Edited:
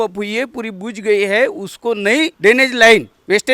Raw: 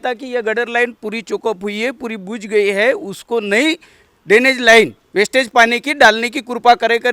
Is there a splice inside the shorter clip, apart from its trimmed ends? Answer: yes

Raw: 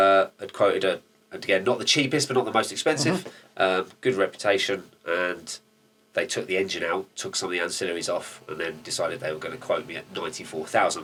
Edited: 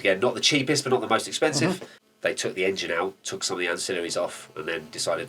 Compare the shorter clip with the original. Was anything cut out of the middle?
yes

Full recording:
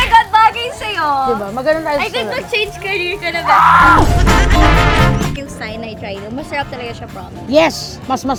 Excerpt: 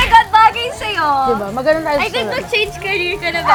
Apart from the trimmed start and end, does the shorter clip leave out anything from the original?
no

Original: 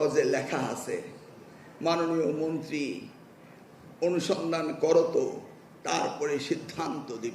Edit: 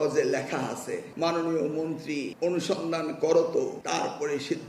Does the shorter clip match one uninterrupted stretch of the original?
no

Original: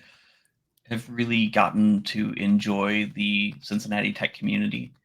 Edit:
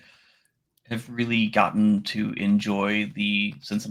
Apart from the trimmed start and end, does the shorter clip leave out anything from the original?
no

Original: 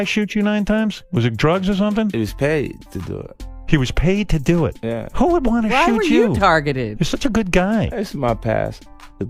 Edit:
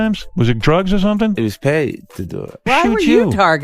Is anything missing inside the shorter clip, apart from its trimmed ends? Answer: yes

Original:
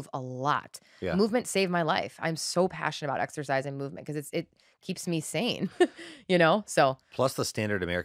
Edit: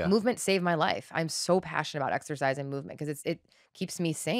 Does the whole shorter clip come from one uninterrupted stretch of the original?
yes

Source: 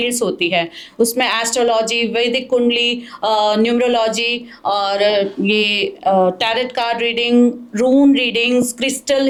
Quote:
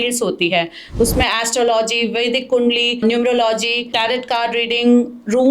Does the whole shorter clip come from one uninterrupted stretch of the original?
no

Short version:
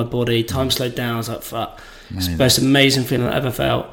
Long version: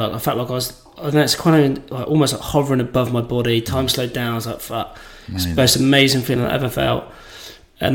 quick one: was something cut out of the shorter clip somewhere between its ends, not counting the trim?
no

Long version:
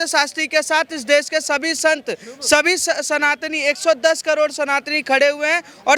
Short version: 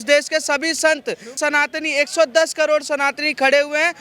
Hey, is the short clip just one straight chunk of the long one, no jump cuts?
no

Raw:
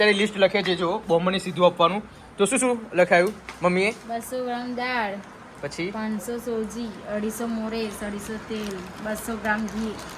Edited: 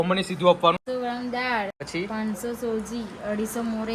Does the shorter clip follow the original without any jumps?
no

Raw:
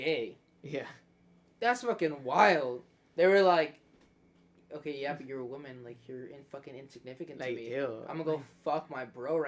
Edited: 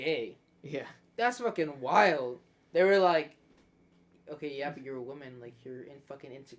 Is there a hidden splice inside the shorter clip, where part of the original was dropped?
yes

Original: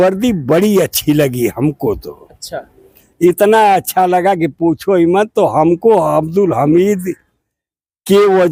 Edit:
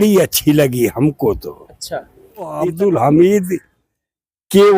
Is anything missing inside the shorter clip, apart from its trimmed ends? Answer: yes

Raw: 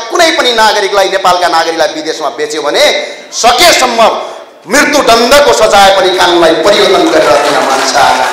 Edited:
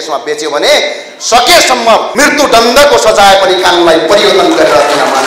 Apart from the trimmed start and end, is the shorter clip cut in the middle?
yes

